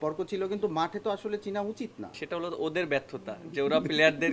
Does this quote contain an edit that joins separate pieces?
yes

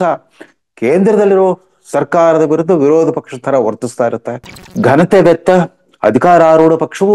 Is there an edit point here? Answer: yes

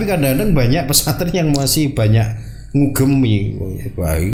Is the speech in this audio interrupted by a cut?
no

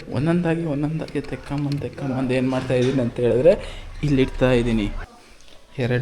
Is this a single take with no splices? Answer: no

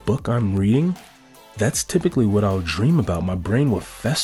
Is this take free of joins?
yes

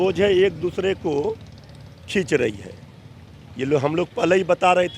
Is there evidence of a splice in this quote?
no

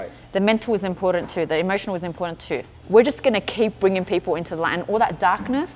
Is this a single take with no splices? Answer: no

